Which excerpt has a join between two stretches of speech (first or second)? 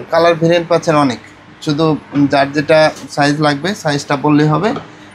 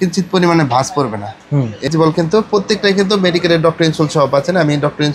second